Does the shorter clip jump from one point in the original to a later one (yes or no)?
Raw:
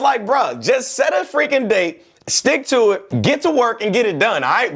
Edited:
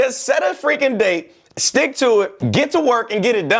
no